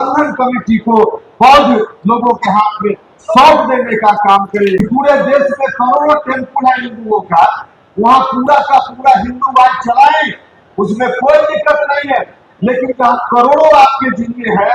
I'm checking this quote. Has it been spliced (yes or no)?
yes